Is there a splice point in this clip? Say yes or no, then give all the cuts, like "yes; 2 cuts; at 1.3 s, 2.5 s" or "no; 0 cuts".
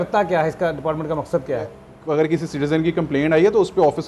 yes; 1 cut; at 1.9 s